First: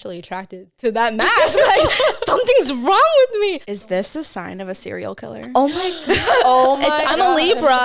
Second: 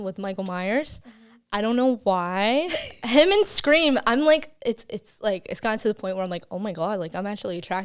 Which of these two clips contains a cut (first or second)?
first